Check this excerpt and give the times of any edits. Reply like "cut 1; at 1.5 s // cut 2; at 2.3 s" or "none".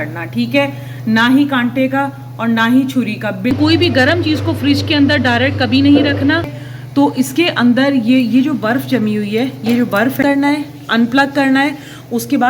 cut 1; at 3.5 s // cut 2; at 6.6 s // cut 3; at 10.2 s

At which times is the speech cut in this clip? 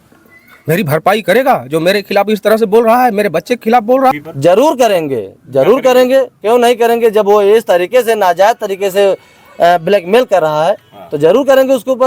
cut 1; at 4.2 s

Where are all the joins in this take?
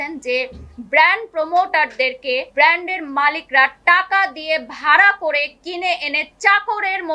cut 1; at 2.5 s

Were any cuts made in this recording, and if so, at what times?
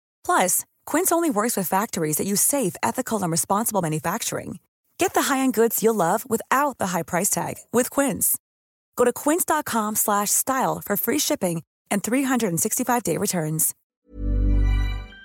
cut 1; at 13.8 s

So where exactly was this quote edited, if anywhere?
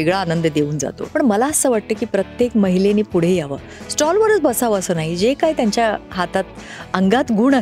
cut 1; at 1.0 s

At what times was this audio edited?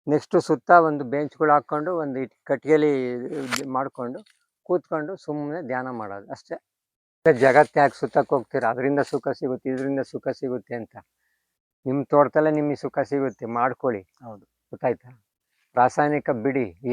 cut 1; at 7.3 s

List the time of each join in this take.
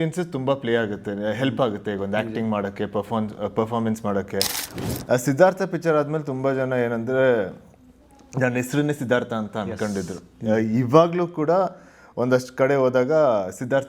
cut 1; at 4.6 s

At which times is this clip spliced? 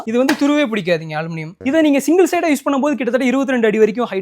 cut 1; at 1.4 s

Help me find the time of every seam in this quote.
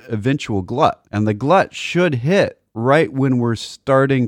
cut 1; at 1.0 s

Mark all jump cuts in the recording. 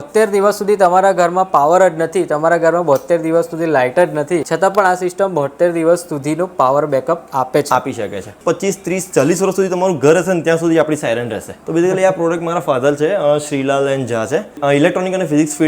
cut 1; at 4.5 s // cut 2; at 8.4 s // cut 3; at 11.6 s // cut 4; at 14.6 s

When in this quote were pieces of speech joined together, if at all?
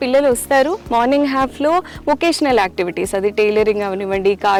none

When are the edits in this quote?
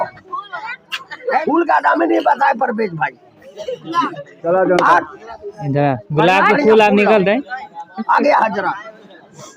cut 1; at 1.4 s // cut 2; at 4.3 s

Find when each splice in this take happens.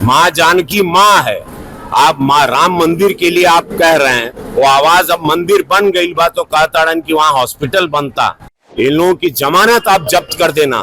cut 1; at 8.6 s

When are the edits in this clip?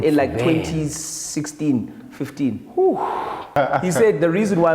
cut 1; at 3.5 s

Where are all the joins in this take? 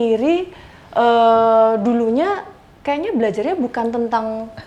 none

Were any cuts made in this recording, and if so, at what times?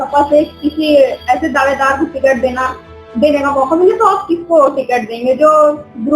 none

